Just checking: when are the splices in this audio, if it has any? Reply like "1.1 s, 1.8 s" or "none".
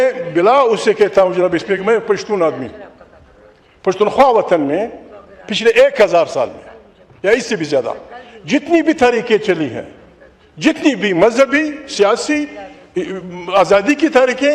none